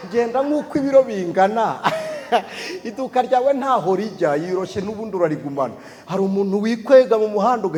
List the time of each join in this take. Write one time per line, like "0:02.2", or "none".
none